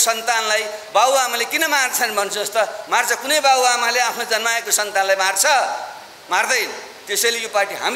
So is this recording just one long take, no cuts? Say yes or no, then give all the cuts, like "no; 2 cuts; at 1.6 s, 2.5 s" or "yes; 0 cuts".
yes; 0 cuts